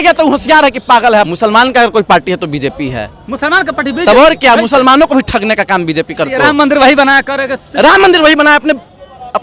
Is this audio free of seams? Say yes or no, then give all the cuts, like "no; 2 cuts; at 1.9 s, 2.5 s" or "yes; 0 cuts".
no; 2 cuts; at 1.3 s, 6.3 s